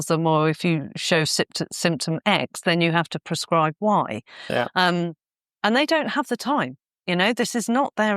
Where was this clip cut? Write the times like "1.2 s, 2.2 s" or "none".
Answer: none